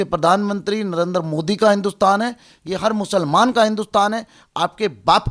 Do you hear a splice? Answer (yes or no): yes